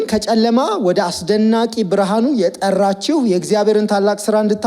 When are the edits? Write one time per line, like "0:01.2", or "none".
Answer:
0:02.6